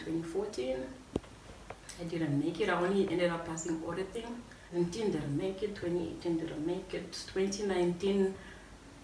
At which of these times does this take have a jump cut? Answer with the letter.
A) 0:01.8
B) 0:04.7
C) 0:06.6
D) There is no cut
B